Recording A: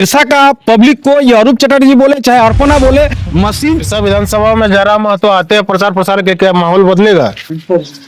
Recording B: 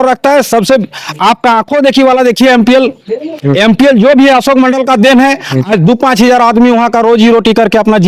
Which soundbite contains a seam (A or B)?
A